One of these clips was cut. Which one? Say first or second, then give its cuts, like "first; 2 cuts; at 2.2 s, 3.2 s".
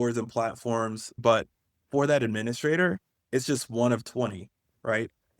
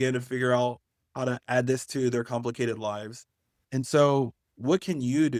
first; 1 cut; at 1.2 s